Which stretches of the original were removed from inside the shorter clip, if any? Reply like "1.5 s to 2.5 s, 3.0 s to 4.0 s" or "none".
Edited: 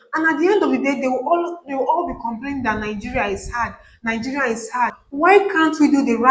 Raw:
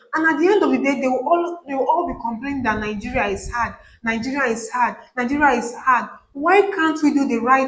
5.0 s to 6.3 s